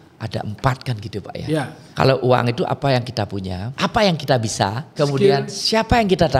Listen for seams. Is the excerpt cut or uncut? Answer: cut